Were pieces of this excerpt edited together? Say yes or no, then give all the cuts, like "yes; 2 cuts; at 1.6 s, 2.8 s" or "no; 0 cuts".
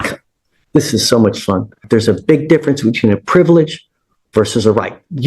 yes; 1 cut; at 1.8 s